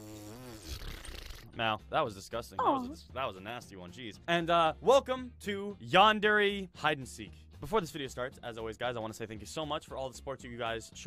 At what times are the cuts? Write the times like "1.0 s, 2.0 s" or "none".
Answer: 9.1 s